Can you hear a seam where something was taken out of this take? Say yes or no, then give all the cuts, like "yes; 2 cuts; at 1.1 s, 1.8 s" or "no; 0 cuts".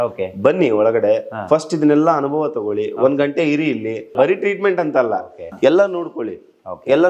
yes; 2 cuts; at 4.1 s, 5.4 s